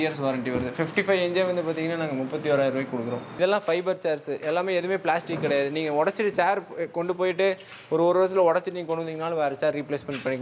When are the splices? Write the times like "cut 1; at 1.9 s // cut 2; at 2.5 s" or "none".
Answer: cut 1; at 3.3 s